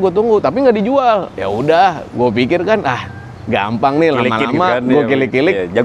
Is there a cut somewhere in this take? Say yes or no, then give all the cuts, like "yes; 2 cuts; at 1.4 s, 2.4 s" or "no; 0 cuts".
no; 0 cuts